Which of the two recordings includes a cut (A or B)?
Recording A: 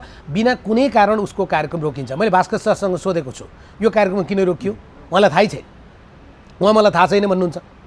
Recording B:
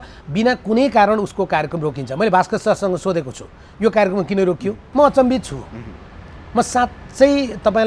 B